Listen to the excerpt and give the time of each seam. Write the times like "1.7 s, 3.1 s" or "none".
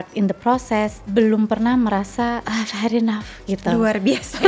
1.0 s, 2.4 s

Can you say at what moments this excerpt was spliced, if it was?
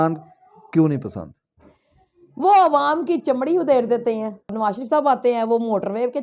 4.5 s

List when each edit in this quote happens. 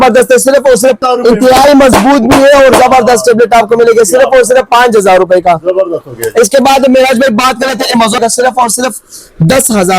1.0 s, 8.2 s

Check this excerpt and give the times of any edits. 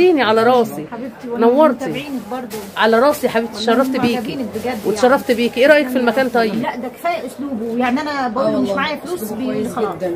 6.5 s

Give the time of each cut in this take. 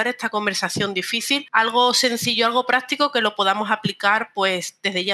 1.5 s

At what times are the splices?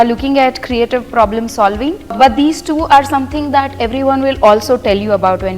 2.2 s

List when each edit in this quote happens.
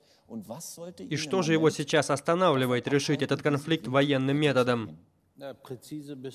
2.2 s

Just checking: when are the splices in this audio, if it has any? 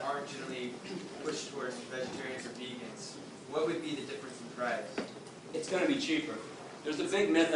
6.6 s

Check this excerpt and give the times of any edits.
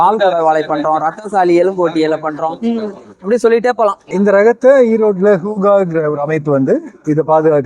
4.1 s

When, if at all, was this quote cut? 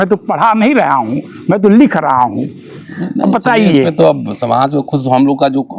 none

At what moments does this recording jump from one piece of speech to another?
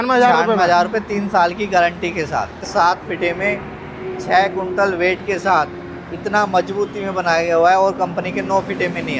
2.7 s

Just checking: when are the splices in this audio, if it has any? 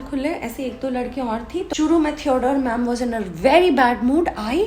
1.7 s

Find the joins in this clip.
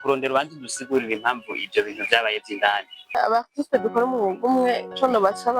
3.2 s

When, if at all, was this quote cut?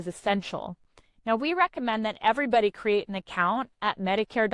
none

